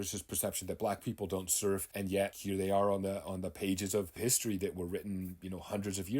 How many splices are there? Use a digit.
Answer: 2